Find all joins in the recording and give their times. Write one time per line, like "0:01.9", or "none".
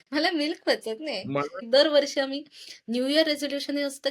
0:01.5

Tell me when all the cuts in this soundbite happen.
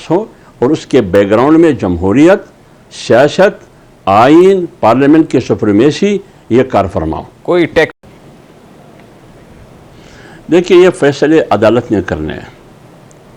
0:07.9

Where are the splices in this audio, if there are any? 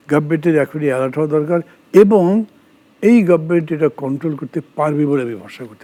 none

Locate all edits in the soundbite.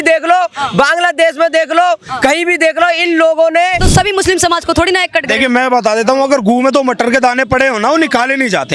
0:03.8

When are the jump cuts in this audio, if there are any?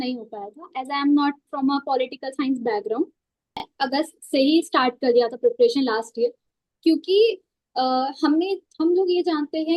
0:03.6

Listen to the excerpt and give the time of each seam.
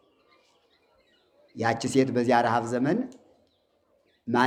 none

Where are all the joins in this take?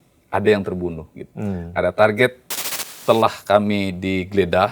0:02.8

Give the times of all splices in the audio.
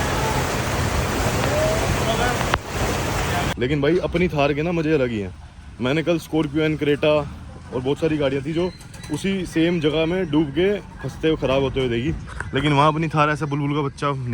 0:03.5

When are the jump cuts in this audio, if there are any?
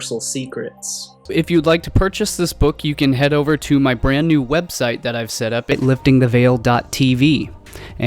0:05.7

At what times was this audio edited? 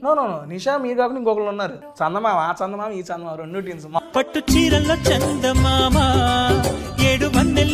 0:01.8
0:04.0

